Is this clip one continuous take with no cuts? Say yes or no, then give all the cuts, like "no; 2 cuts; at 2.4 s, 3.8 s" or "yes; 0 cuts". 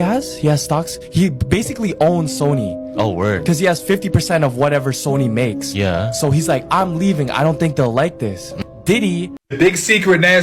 no; 1 cut; at 9.4 s